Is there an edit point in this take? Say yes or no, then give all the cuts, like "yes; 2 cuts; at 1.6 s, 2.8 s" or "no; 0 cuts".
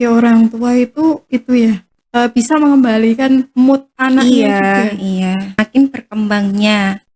yes; 1 cut; at 5.6 s